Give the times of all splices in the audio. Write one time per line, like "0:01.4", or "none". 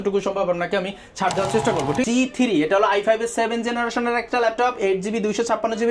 0:02.0